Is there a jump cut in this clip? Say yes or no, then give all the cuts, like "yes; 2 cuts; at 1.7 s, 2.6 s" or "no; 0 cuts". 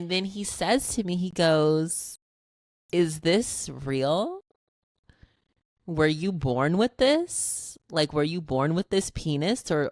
no; 0 cuts